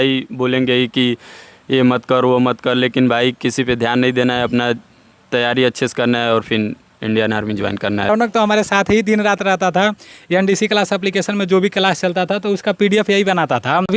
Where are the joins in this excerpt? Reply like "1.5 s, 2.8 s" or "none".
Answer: none